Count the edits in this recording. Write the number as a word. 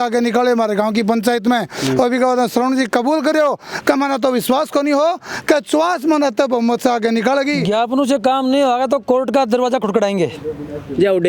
one